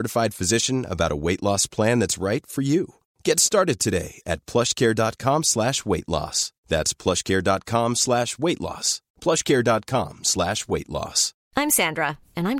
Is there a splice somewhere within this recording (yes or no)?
no